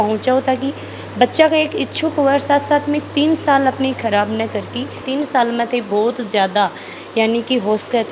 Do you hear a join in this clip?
no; 0 cuts

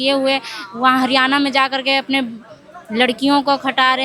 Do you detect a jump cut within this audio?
no; 0 cuts

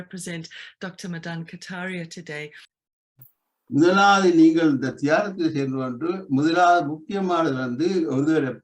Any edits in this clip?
yes; 1 cut; at 2.7 s

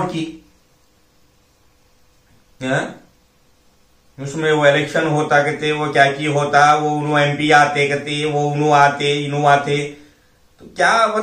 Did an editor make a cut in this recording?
no; 0 cuts

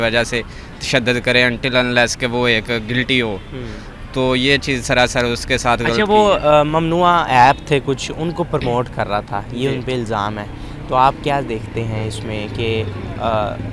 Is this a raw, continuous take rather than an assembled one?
yes; 0 cuts

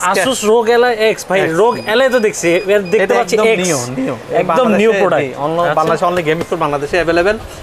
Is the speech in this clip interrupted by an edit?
no; 0 cuts

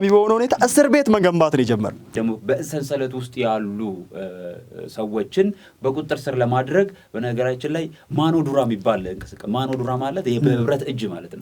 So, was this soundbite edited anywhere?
yes; 1 cut; at 2.1 s

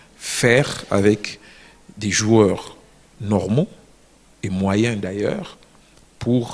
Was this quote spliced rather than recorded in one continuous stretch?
no; 0 cuts

